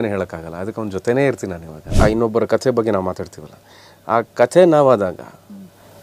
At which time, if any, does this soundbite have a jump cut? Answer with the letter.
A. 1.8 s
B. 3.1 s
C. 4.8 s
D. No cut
A